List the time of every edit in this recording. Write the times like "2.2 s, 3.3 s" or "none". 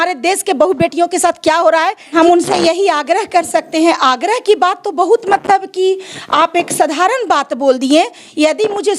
2.1 s